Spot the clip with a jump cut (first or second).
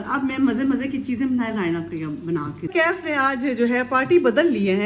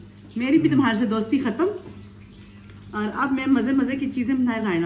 first